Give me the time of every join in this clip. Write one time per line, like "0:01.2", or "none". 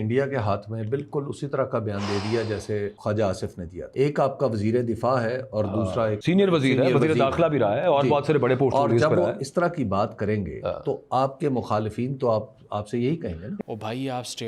0:03.0
0:03.8
0:06.2
0:13.5